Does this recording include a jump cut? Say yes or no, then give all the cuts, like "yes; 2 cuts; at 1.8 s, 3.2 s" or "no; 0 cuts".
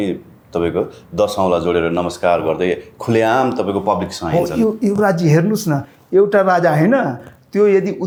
no; 0 cuts